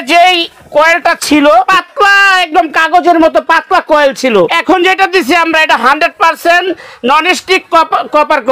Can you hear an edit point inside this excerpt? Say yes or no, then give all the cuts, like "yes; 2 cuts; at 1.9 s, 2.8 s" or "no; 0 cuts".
yes; 2 cuts; at 1.7 s, 4.5 s